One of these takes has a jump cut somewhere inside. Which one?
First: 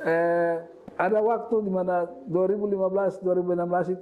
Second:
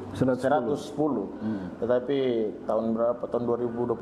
first; 1 cut; at 1.1 s

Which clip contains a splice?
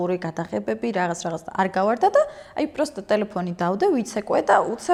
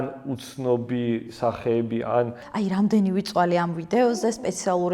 second; 1 cut; at 2.4 s

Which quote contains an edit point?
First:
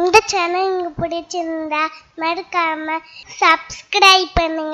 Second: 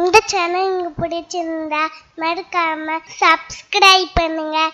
second; 1 cut; at 3.1 s

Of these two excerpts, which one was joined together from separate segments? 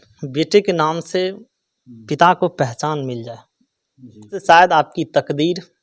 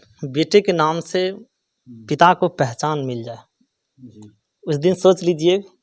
first; 1 cut; at 4.4 s

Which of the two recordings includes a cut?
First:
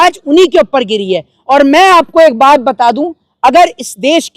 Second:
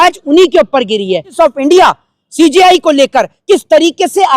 second; 1 cut; at 1.3 s

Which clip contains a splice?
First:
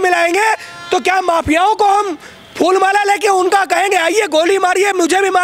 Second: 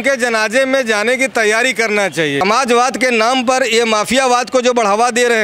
second; 1 cut; at 2.4 s

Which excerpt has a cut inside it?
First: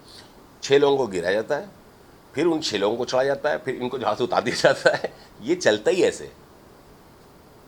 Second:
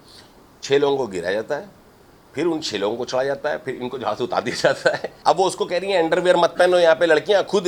second; 1 cut; at 5.1 s

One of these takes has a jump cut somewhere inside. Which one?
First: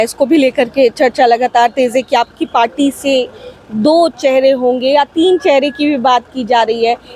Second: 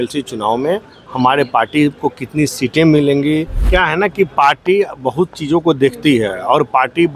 second; 1 cut; at 3.6 s

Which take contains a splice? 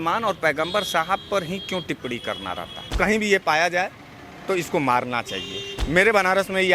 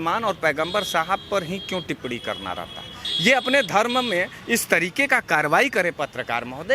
first; 1 cut; at 2.9 s

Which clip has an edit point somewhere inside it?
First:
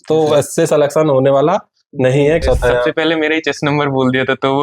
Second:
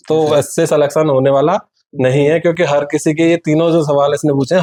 first; 1 cut; at 2.4 s

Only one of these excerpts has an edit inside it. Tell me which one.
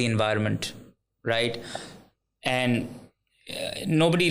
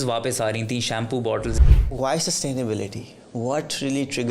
second; 1 cut; at 1.5 s

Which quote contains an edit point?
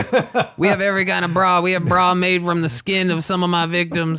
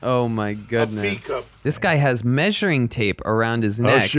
second; 1 cut; at 1.5 s

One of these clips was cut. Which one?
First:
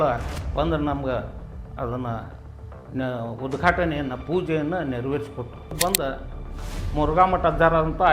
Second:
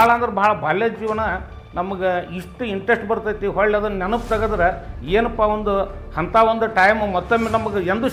first; 1 cut; at 5.7 s

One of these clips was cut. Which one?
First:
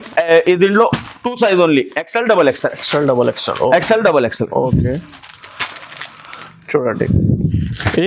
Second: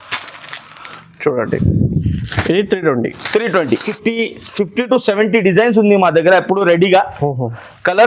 second; 1 cut; at 3.9 s

